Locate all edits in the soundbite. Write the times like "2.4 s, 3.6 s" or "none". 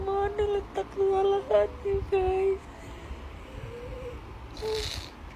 none